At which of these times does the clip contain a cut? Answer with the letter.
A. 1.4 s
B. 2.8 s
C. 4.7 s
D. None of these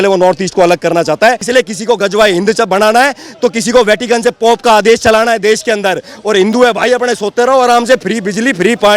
A